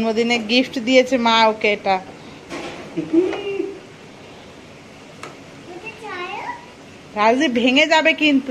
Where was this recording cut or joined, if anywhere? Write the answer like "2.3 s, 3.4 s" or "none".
none